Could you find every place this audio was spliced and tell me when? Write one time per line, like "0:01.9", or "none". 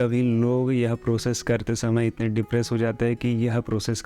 none